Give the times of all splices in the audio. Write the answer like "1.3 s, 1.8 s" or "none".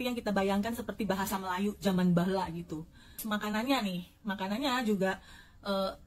3.2 s